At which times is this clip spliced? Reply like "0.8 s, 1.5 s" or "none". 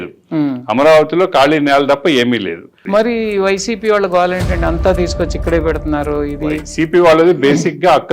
2.8 s